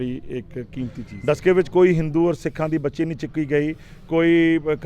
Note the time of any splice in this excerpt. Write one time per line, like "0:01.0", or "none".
0:01.0